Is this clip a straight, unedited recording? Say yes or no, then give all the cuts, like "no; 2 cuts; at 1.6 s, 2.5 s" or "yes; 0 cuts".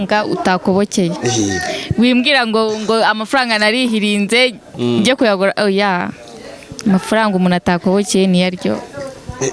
yes; 0 cuts